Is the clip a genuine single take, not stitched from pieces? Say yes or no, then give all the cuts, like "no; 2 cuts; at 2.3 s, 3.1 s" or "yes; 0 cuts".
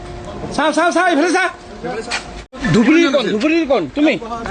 no; 1 cut; at 2.5 s